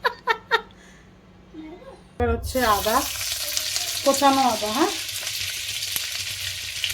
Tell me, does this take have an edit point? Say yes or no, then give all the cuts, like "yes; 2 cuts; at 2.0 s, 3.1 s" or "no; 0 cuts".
yes; 1 cut; at 2.2 s